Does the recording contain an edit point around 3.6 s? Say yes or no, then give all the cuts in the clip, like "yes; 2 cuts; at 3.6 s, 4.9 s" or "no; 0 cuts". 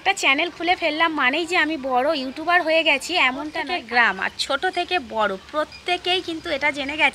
yes; 1 cut; at 3.6 s